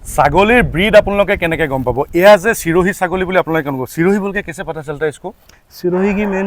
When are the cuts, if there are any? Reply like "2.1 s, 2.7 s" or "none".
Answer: none

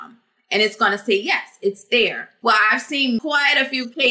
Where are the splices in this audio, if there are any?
2.3 s, 3.2 s

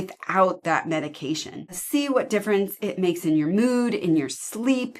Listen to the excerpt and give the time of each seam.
1.8 s

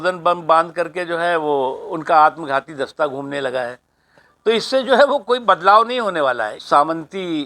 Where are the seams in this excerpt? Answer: 6.5 s

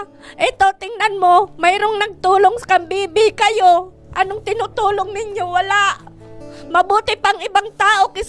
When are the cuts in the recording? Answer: none

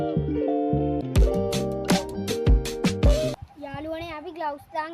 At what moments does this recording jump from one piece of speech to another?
1.0 s, 3.3 s

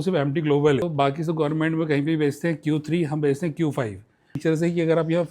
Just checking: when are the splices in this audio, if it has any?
0.8 s, 4.3 s

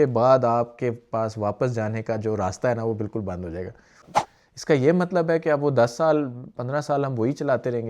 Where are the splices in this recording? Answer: 4.0 s

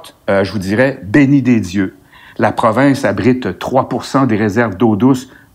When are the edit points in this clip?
none

